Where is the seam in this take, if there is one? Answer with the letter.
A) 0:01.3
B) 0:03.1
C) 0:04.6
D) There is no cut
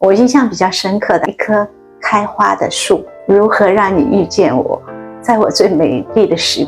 A